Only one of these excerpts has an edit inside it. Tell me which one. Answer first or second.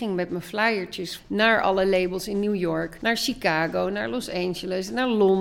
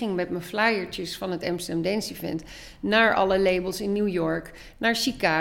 first